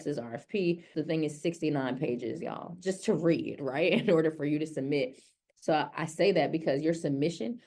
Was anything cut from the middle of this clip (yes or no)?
yes